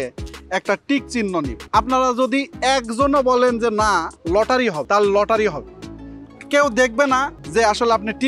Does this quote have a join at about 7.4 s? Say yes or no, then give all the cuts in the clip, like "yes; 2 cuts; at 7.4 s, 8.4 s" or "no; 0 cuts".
yes; 3 cuts; at 1.6 s, 4.8 s, 7.4 s